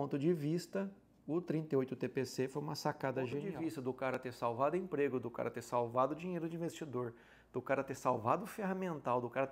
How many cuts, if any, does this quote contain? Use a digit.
1